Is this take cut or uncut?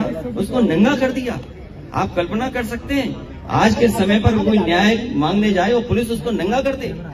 uncut